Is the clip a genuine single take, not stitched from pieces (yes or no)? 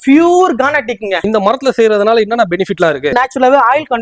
no